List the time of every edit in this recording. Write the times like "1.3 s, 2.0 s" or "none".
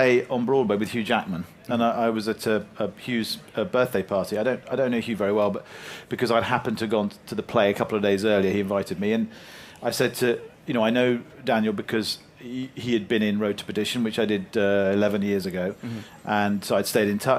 7.0 s